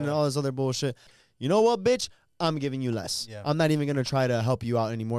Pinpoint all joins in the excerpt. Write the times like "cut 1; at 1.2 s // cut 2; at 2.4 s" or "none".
cut 1; at 1.1 s